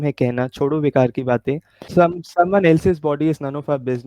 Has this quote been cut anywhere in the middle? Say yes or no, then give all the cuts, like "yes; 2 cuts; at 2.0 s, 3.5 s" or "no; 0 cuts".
yes; 1 cut; at 1.9 s